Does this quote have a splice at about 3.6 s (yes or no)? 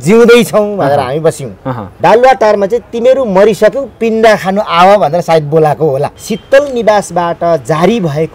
no